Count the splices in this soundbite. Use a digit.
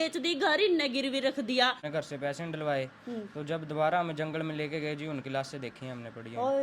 1